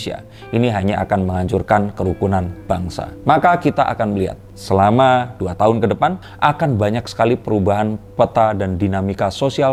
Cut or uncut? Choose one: uncut